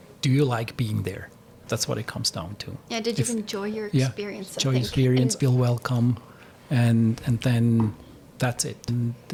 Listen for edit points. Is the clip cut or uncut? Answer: uncut